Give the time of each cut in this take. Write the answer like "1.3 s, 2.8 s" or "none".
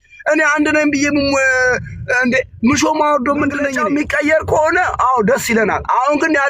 3.7 s